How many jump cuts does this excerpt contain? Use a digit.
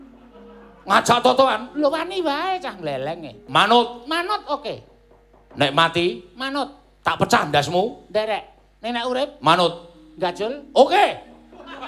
1